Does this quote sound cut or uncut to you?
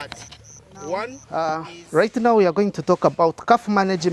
cut